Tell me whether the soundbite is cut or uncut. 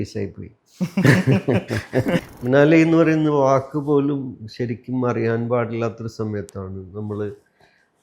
cut